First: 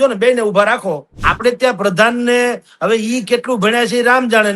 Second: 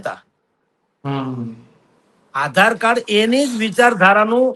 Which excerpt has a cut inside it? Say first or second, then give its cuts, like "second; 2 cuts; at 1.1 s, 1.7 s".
first; 1 cut; at 1.1 s